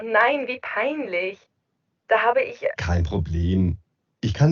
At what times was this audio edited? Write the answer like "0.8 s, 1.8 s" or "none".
none